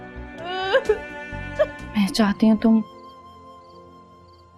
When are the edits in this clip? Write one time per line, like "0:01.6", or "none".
0:01.8